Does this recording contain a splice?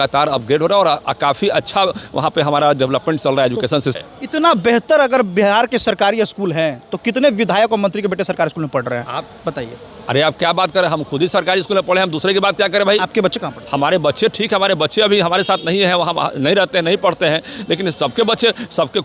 yes; 1 cut; at 4.0 s

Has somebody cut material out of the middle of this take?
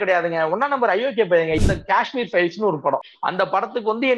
yes; 2 cuts; at 1.6 s, 3.2 s

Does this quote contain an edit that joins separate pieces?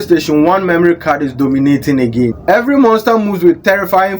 yes; 1 cut; at 2.4 s

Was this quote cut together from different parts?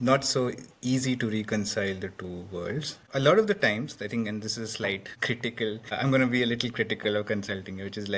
yes; 1 cut; at 3.0 s

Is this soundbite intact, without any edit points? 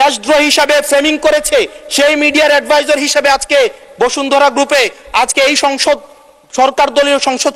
yes; 0 cuts

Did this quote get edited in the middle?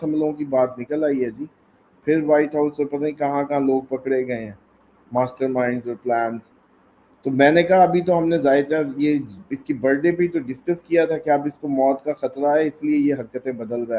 no; 0 cuts

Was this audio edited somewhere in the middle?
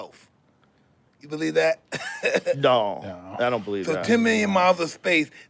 no; 0 cuts

